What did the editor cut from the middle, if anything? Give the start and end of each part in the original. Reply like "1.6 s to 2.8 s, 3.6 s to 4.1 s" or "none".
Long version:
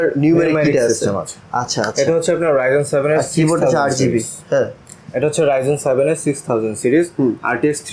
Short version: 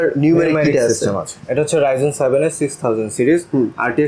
1.3 s to 5.0 s